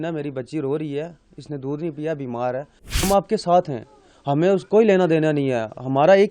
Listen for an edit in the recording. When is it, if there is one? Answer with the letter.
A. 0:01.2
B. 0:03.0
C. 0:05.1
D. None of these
B